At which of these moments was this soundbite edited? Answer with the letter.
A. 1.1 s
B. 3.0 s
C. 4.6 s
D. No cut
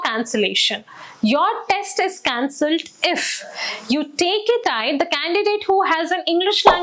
C